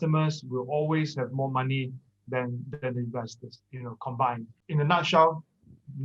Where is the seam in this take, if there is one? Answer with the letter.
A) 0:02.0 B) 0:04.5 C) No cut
B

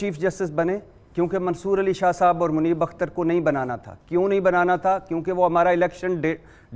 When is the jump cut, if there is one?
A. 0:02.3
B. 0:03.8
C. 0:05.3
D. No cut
D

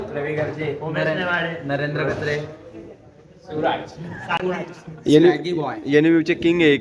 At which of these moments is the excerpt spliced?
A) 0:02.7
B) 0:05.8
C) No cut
C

